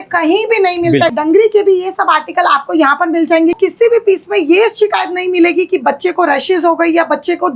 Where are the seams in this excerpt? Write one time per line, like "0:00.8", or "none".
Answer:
0:01.1
0:03.6